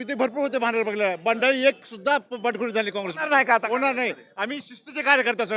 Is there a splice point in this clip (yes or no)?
no